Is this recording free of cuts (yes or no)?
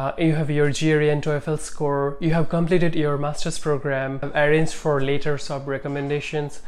no